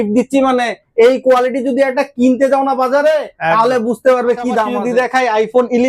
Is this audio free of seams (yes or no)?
no